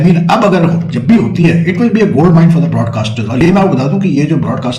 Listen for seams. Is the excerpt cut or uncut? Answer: uncut